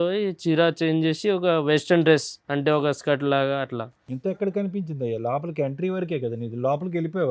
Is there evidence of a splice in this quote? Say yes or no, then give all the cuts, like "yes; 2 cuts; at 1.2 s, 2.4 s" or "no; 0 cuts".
no; 0 cuts